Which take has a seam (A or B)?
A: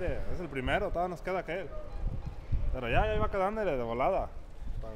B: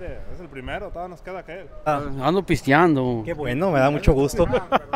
B